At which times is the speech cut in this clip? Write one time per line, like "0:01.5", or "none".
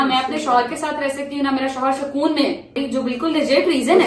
0:02.8

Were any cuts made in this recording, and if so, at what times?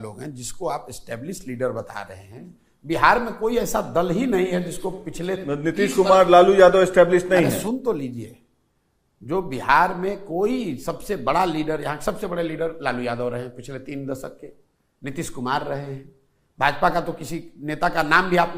none

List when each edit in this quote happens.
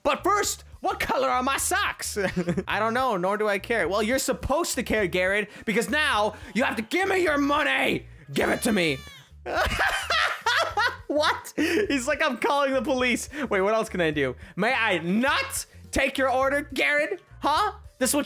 0:02.7

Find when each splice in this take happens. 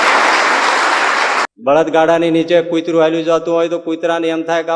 0:01.5

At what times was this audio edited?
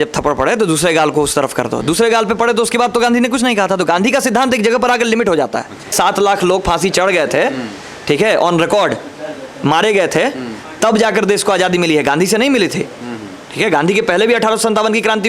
0:05.9

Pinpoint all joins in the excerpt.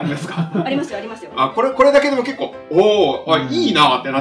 none

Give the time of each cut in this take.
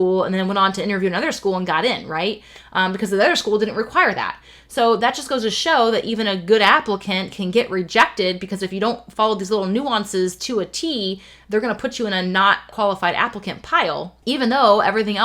0:12.7
0:14.1

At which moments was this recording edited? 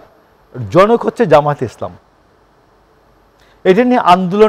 none

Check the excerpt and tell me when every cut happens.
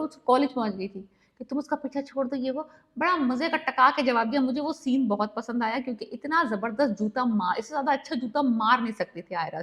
none

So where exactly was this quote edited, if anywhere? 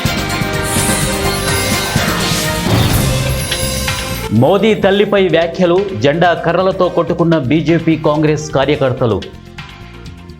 0:02.2
0:04.3
0:09.4

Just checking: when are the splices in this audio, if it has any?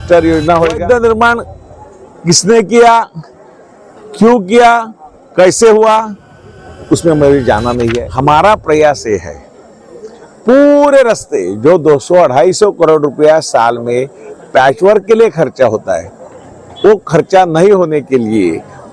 0:00.8
0:08.0

